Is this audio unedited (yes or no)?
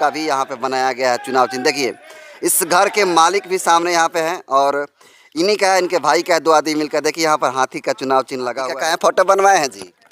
no